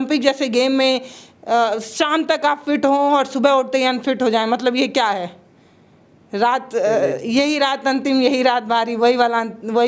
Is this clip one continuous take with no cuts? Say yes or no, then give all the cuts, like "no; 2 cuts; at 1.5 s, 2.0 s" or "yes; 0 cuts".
yes; 0 cuts